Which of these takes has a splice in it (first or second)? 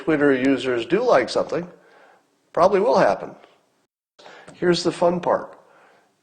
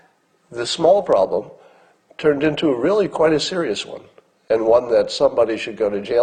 first